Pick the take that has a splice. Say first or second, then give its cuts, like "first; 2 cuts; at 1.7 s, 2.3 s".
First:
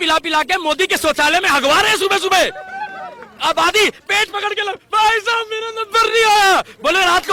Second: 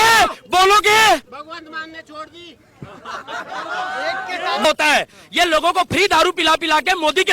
second; 1 cut; at 4.6 s